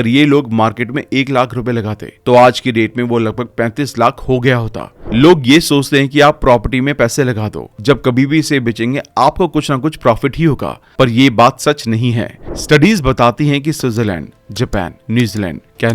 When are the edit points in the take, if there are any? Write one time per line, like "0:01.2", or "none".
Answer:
0:05.0
0:12.4